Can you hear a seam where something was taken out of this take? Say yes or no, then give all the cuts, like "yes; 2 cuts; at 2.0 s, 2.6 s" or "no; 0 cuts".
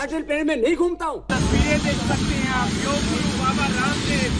yes; 1 cut; at 1.3 s